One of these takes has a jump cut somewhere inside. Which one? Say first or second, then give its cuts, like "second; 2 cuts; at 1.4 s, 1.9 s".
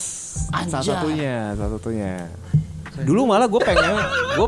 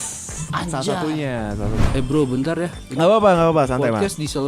second; 1 cut; at 1.8 s